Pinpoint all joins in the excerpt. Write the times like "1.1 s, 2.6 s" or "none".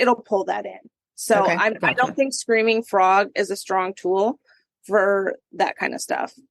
5.5 s